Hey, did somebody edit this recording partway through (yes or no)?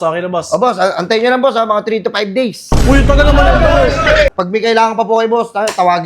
yes